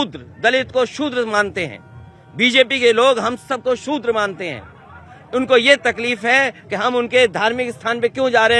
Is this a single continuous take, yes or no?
yes